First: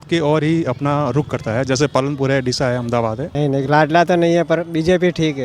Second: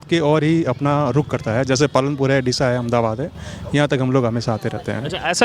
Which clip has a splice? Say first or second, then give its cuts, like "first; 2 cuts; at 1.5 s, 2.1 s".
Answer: first; 1 cut; at 3.2 s